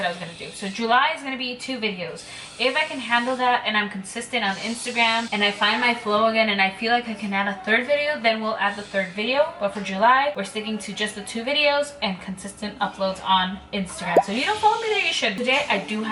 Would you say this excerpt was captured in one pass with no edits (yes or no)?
yes